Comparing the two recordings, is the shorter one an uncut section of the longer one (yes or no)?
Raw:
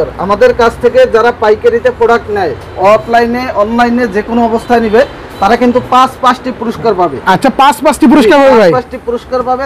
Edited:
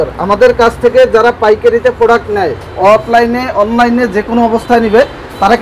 yes